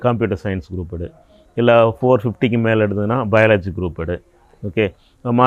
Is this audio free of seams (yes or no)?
yes